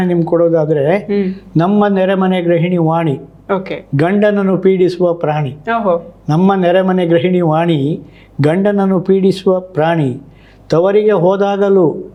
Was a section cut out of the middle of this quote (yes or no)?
no